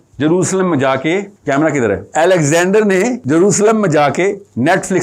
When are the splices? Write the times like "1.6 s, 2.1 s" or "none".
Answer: 1.3 s, 2.1 s, 3.2 s